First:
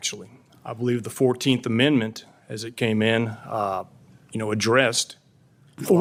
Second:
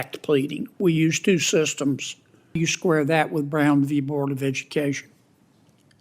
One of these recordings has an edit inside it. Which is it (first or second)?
second